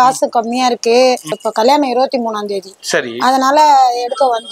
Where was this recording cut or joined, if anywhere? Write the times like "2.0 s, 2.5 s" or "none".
1.4 s